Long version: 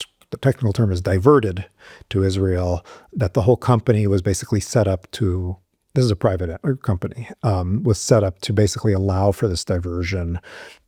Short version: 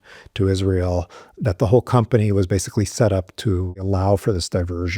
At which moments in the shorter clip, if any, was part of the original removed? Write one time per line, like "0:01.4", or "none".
0:03.8